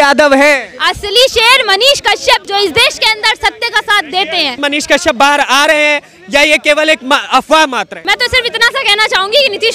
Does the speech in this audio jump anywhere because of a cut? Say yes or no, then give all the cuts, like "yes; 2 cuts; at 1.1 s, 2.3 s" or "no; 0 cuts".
yes; 3 cuts; at 2.4 s, 4.6 s, 8.0 s